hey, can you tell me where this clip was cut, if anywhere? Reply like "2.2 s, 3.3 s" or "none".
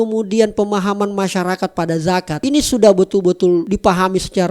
2.4 s, 3.7 s